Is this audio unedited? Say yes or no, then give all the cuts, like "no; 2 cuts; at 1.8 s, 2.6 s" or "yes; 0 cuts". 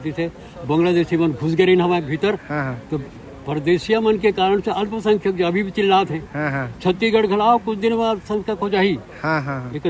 yes; 0 cuts